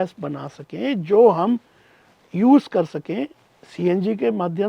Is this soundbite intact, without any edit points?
yes; 0 cuts

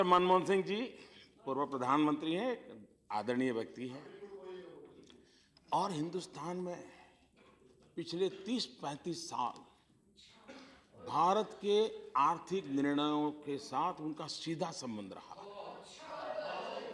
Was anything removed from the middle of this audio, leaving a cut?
no; 0 cuts

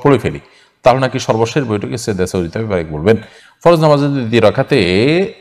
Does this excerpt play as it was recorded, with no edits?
yes; 0 cuts

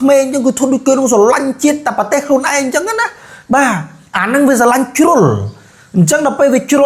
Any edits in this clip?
no; 0 cuts

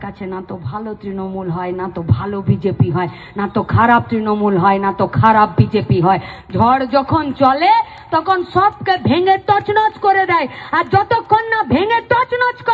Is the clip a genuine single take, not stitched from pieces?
yes; 0 cuts

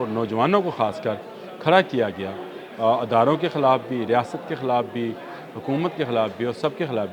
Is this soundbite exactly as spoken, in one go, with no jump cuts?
yes; 0 cuts

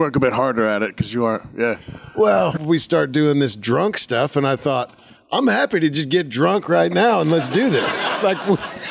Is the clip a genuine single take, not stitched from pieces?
no; 1 cut; at 2.6 s

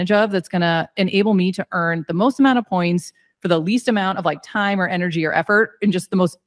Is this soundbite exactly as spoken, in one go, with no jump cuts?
yes; 0 cuts

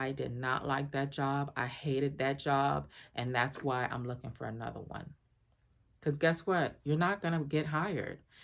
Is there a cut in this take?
no; 0 cuts

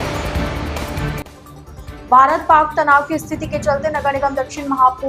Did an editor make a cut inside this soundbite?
yes; 1 cut; at 1.4 s

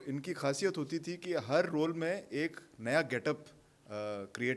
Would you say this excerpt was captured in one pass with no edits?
yes; 0 cuts

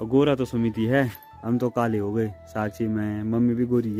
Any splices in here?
no; 0 cuts

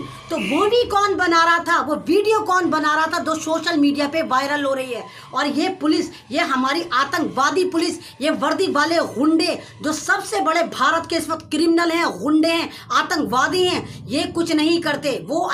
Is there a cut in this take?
no; 0 cuts

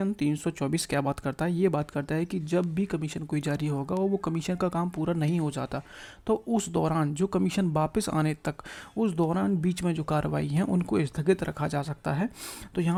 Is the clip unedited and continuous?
yes; 0 cuts

